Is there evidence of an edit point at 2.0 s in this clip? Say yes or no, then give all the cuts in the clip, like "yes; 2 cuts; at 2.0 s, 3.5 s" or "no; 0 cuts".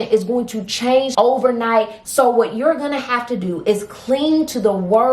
yes; 2 cuts; at 1.1 s, 2.0 s